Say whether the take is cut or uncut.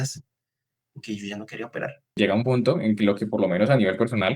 cut